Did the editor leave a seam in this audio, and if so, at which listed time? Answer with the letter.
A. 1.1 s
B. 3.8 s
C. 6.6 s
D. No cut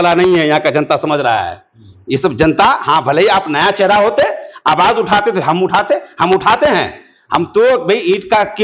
D